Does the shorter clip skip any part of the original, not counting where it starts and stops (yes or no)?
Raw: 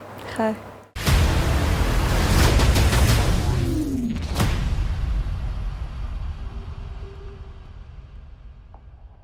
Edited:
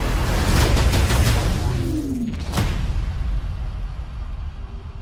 no